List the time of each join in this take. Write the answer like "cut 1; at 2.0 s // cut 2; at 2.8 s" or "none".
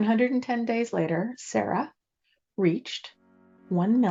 none